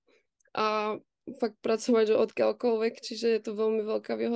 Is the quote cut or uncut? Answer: uncut